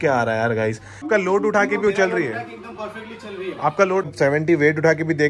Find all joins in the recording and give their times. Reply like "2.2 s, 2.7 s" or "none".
1.0 s, 4.1 s